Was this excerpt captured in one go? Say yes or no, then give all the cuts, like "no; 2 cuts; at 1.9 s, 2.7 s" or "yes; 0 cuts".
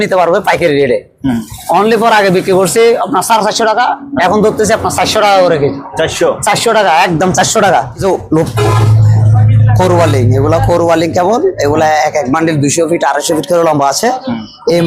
no; 1 cut; at 8.0 s